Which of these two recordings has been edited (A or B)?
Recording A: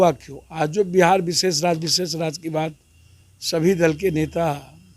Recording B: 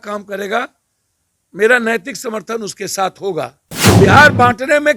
B